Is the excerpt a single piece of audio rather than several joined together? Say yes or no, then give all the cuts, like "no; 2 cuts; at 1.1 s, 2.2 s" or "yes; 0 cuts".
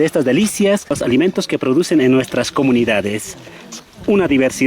no; 1 cut; at 1.0 s